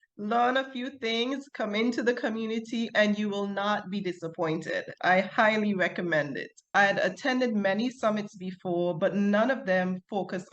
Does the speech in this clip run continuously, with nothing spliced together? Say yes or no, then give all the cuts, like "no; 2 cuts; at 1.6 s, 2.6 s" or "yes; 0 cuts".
no; 1 cut; at 6.7 s